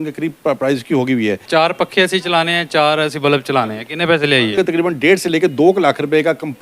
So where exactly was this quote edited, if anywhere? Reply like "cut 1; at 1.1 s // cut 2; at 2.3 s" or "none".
cut 1; at 1.4 s // cut 2; at 4.6 s